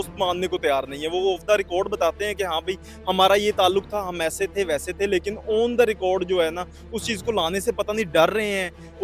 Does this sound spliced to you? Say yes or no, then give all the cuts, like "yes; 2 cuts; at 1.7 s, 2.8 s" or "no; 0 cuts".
no; 0 cuts